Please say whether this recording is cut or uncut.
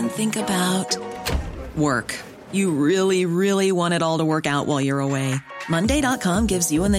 uncut